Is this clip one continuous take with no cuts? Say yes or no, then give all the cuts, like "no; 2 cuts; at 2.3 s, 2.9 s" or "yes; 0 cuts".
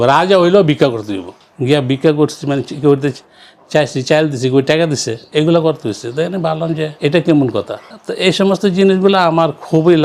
yes; 0 cuts